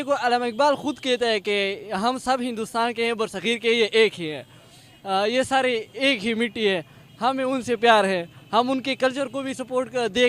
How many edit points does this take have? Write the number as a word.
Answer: zero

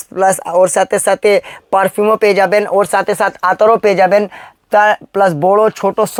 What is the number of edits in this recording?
zero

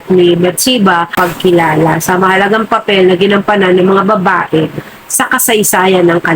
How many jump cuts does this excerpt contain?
one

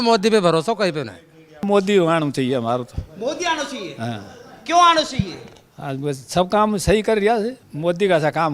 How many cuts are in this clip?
two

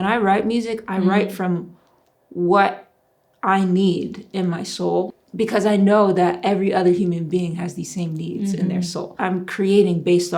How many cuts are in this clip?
two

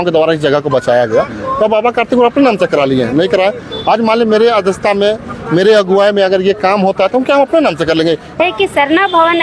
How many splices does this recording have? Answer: one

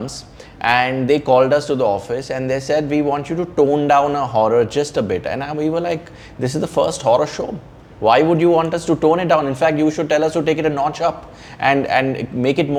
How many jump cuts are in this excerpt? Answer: zero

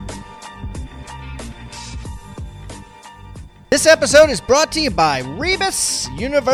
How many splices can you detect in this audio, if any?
two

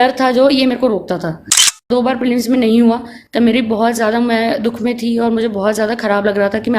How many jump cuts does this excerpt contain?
one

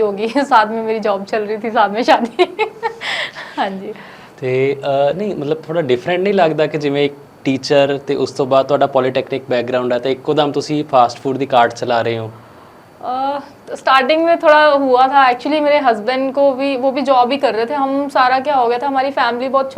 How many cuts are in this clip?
zero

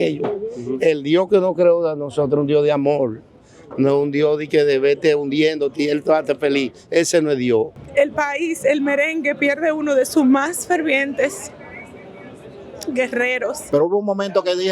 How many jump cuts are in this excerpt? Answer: two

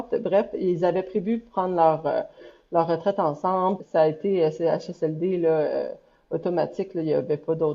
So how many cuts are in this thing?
one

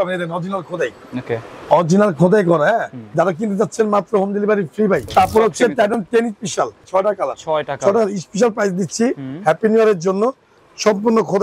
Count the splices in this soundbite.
four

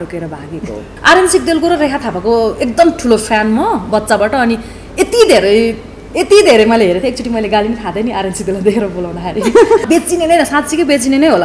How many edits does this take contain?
two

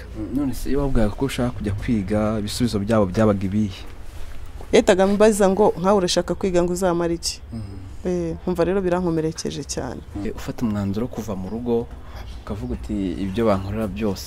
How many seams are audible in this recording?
one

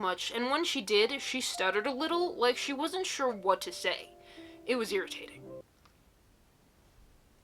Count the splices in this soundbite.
zero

